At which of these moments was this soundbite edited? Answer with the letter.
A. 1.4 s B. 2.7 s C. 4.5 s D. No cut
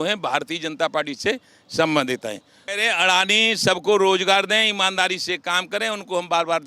B